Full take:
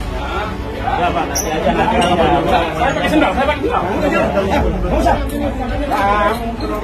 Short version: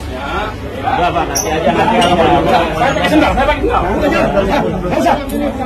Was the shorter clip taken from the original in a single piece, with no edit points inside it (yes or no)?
yes